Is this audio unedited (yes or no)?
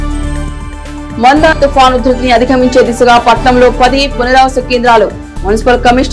yes